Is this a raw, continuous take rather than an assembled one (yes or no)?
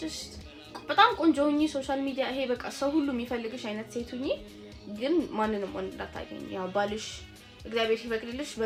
yes